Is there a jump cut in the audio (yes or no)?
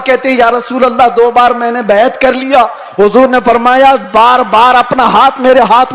no